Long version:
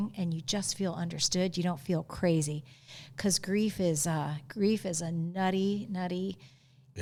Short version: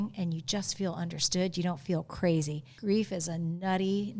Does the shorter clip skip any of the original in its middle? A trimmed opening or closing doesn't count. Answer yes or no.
yes